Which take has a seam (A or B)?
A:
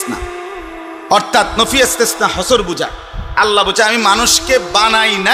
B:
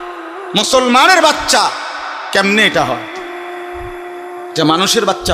B